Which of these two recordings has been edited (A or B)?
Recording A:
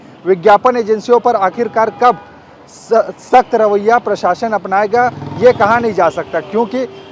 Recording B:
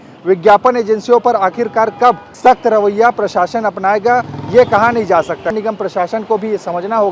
B